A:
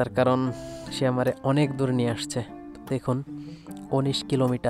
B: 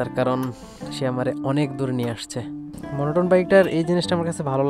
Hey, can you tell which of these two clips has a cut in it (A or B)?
B